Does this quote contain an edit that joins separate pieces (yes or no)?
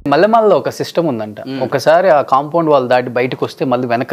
no